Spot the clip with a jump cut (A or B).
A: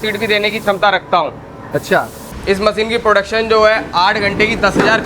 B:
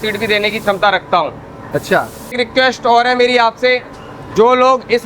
A